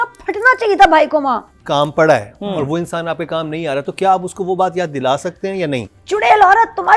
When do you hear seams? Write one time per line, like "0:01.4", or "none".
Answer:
0:01.5
0:05.9